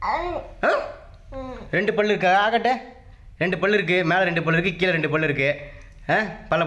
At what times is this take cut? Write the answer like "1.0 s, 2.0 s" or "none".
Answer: none